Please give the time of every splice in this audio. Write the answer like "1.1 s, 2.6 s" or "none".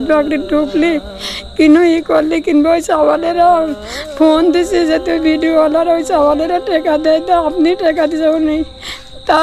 none